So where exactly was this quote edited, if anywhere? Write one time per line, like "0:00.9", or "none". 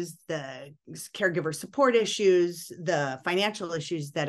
none